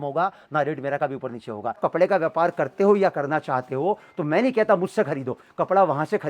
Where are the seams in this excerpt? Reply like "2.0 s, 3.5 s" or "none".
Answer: 1.8 s